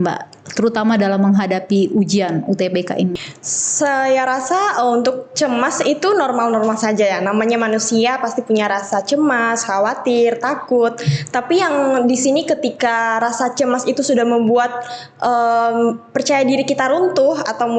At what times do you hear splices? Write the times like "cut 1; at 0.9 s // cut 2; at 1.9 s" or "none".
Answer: cut 1; at 3.1 s